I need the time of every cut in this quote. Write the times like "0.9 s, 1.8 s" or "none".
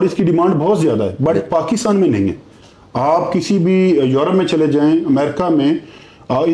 none